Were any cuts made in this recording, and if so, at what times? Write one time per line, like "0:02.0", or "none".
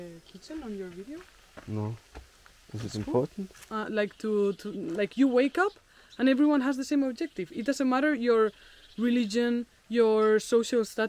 0:03.6